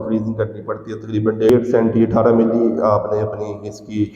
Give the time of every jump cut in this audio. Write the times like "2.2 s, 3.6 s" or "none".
1.5 s